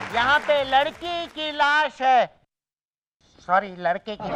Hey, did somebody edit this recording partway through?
no; 0 cuts

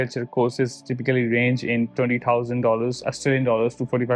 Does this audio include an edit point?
no; 0 cuts

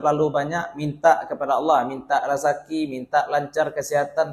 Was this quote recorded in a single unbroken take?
yes; 0 cuts

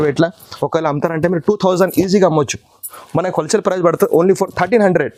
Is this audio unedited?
yes; 0 cuts

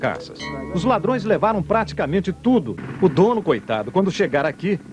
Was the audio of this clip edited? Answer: yes; 1 cut; at 2.8 s

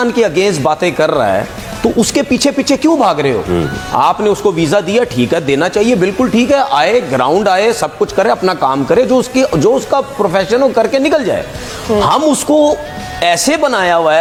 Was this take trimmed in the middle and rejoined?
no; 0 cuts

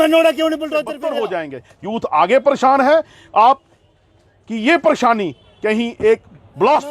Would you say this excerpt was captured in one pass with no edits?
no; 1 cut; at 0.9 s

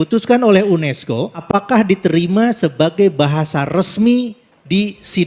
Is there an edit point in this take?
yes; 1 cut; at 1.4 s

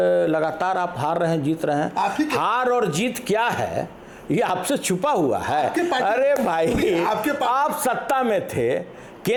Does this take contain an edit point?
no; 0 cuts

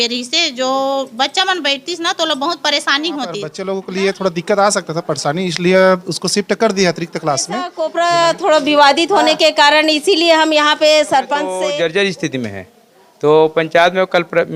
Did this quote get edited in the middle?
yes; 3 cuts; at 3.6 s, 7.8 s, 11.5 s

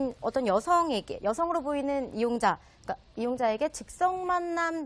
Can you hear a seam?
yes; 1 cut; at 3.5 s

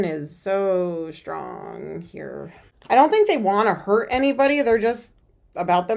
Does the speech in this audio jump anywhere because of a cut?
yes; 1 cut; at 2.6 s

